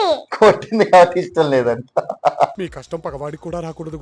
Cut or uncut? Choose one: uncut